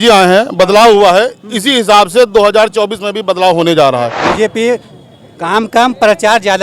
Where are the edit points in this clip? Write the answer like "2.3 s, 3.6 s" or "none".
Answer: 4.2 s